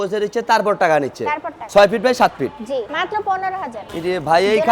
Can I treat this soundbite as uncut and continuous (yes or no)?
no